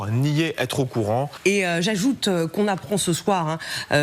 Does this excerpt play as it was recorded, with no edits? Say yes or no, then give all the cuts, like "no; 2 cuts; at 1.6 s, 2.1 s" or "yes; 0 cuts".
no; 1 cut; at 1.3 s